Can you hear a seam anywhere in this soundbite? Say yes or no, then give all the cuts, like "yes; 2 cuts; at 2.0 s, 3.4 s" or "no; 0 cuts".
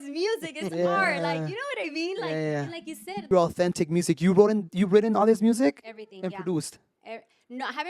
yes; 1 cut; at 3.3 s